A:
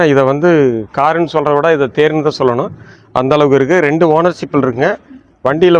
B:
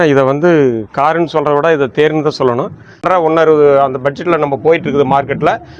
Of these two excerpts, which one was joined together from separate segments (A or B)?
B